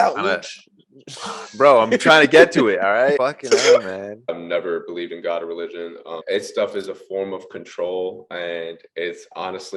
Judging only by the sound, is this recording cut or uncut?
cut